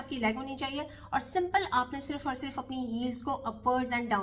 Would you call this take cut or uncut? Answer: uncut